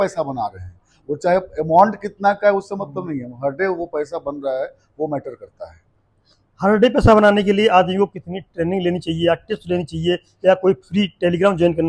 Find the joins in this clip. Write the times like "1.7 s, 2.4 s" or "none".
none